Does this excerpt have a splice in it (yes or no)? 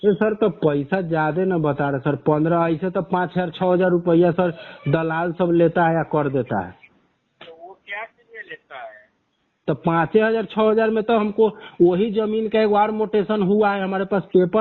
no